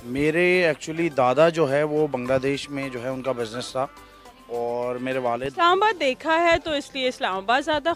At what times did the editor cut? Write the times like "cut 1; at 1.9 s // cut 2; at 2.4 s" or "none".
cut 1; at 5.5 s